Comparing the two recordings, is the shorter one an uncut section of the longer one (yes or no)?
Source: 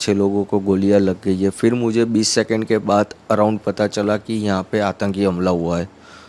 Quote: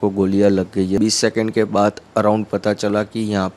no